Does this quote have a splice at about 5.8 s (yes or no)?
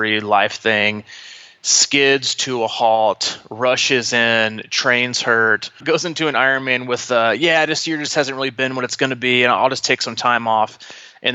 yes